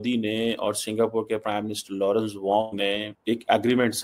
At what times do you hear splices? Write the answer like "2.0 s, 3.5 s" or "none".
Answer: 3.1 s